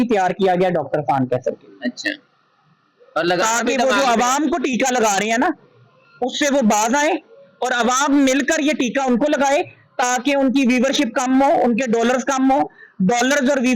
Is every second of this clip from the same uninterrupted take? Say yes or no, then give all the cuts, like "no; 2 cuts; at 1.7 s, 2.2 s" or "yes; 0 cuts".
yes; 0 cuts